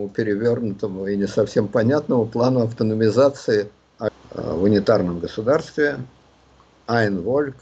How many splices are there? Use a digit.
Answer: 1